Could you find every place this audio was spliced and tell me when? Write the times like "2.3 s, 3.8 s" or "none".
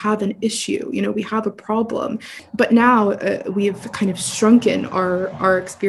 2.3 s

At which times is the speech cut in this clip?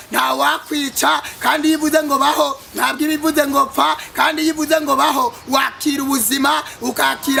none

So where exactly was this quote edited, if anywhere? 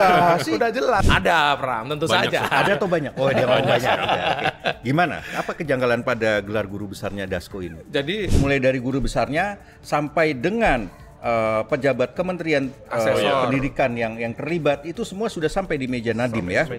1.1 s, 8.3 s

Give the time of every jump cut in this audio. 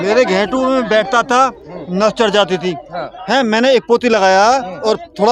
none

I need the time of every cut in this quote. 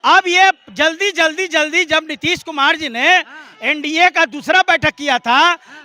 none

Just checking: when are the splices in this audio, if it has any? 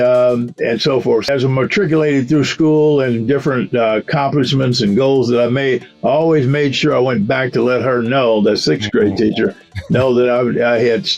1.3 s

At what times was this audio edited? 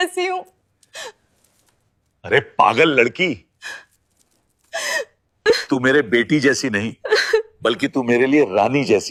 none

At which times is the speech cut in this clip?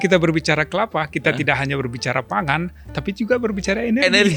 none

